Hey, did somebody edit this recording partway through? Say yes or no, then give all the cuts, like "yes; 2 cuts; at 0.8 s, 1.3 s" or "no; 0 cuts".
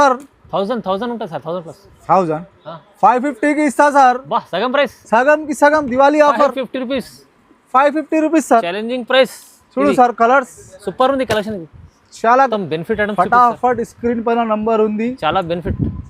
yes; 1 cut; at 12.5 s